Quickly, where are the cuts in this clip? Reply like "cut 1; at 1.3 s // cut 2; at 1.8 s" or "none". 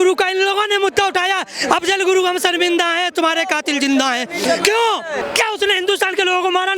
cut 1; at 5.2 s